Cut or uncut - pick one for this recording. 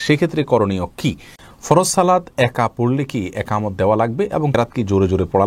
cut